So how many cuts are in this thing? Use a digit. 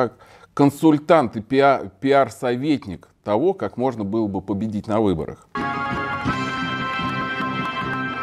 1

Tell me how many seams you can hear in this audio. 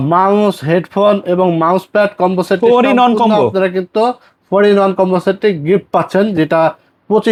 0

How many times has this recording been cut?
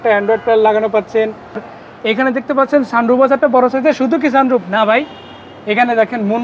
1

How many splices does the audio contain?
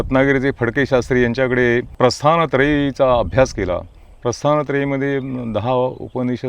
1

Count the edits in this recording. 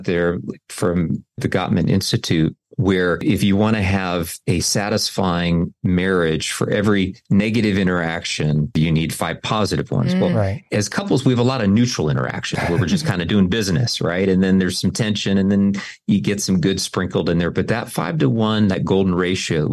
1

